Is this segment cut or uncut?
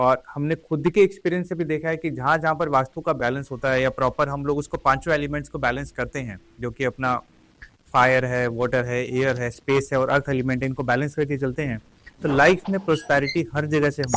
uncut